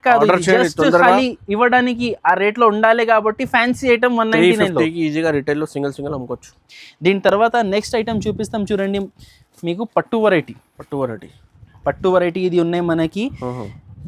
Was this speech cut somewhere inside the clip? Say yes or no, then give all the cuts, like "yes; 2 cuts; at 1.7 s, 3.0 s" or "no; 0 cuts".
no; 0 cuts